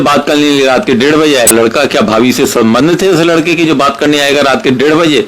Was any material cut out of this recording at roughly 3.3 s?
no; 1 cut; at 1.5 s

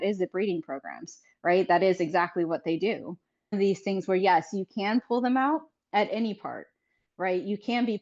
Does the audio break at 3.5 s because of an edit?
yes; 1 cut; at 3.5 s

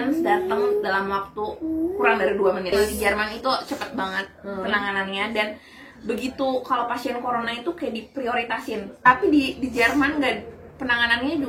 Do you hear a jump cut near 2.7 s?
yes; 2 cuts; at 2.7 s, 9.1 s

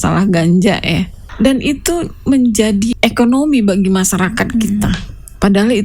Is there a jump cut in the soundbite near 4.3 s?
no; 2 cuts; at 1.2 s, 2.9 s

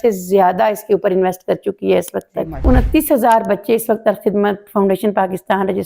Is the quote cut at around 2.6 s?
yes; 1 cut; at 2.6 s

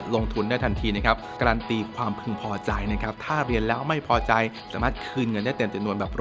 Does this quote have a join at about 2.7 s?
no; 2 cuts; at 1.3 s, 4.6 s

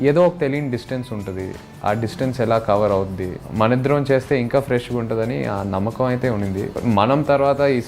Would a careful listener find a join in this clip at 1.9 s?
no; 2 cuts; at 3.4 s, 6.7 s

